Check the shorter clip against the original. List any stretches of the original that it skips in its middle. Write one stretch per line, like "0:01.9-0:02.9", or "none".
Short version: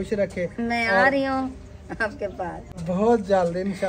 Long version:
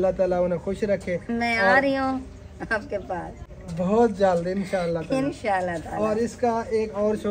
0:03.4-0:03.6